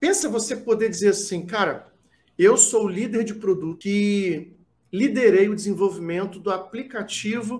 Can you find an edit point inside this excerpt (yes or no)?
yes